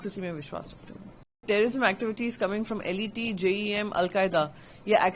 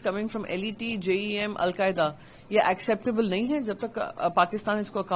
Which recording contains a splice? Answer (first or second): first